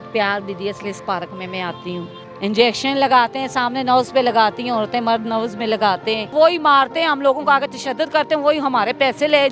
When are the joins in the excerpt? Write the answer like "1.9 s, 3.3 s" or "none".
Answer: 2.2 s, 6.3 s

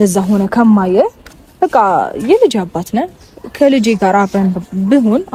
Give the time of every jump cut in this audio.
none

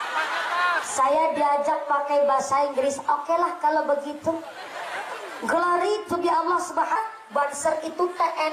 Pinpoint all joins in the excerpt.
7.0 s

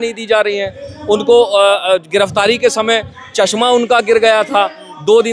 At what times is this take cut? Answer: none

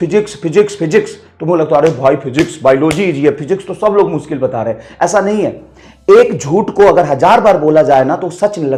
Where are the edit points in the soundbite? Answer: none

